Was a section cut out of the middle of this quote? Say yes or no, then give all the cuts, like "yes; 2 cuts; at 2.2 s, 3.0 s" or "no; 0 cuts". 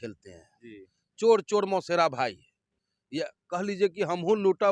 no; 0 cuts